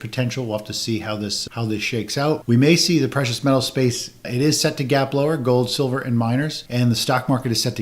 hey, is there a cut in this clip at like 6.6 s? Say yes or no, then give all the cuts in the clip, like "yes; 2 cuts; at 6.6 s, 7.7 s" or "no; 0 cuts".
yes; 2 cuts; at 2.4 s, 6.6 s